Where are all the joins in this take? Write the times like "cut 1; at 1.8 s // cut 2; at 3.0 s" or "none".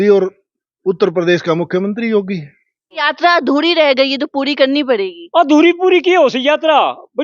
cut 1; at 3.1 s